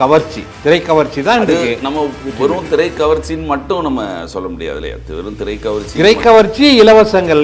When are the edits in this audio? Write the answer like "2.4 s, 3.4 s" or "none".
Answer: none